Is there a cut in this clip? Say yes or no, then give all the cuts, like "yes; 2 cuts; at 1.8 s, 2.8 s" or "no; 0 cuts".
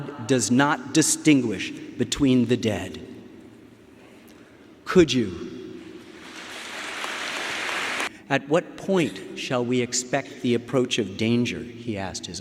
yes; 1 cut; at 8.1 s